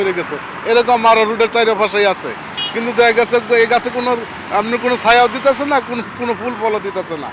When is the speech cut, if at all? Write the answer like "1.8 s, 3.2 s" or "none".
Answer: none